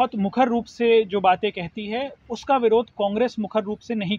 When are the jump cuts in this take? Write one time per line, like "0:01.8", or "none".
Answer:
none

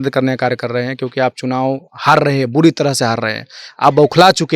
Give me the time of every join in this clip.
none

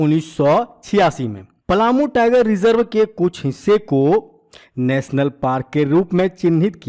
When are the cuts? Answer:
none

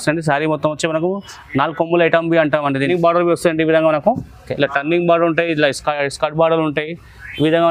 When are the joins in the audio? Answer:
0:02.9

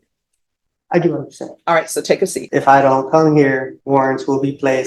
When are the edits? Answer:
0:02.4
0:03.7

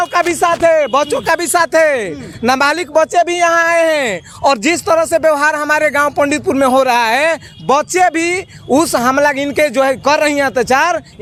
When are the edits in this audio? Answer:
none

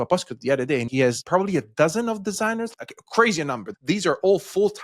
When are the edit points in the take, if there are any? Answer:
0:01.1
0:02.7
0:03.7

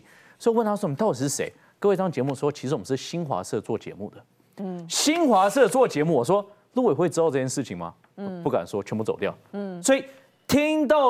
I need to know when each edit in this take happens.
none

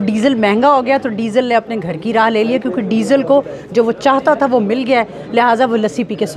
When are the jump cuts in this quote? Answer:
none

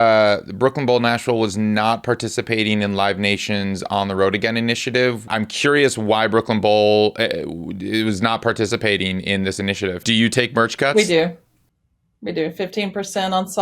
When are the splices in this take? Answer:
0:05.3
0:09.9

